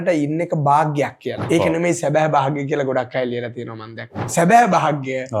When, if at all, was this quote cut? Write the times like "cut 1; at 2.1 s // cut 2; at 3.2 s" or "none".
cut 1; at 1.4 s // cut 2; at 4.3 s